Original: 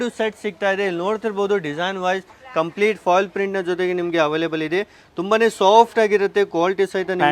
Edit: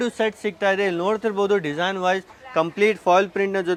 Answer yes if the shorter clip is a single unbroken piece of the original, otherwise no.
yes